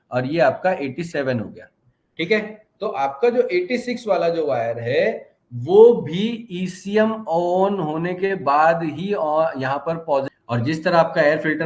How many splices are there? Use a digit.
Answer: 1